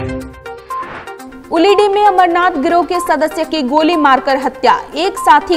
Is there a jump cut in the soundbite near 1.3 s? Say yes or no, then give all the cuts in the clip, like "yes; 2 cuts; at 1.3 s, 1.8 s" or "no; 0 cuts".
no; 0 cuts